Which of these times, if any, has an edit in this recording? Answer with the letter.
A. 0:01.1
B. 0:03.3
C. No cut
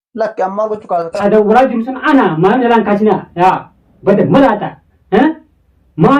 A